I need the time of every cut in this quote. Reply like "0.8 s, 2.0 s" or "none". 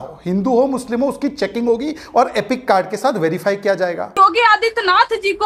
4.2 s

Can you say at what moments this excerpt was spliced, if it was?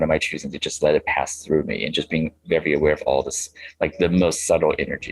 none

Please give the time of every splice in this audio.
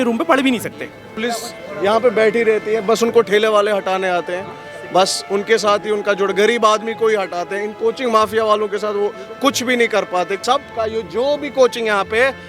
1.1 s, 10.4 s

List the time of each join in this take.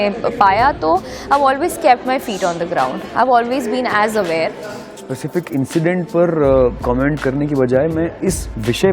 4.9 s

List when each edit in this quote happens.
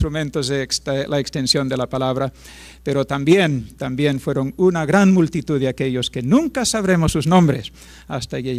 none

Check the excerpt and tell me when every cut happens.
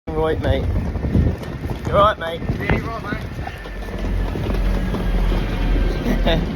none

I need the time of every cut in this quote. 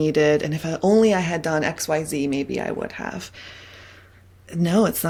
none

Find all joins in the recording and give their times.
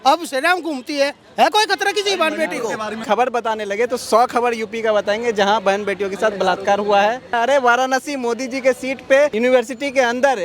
3.0 s, 7.3 s

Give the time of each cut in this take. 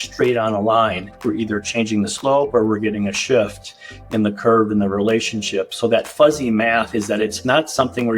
1.1 s

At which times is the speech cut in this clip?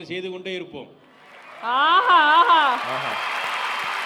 none

